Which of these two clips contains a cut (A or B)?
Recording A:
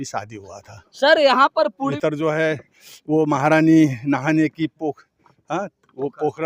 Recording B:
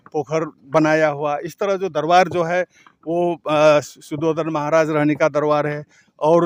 A